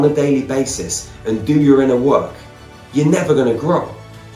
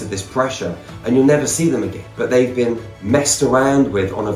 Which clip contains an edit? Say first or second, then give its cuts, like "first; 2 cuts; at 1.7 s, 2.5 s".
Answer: second; 1 cut; at 2.0 s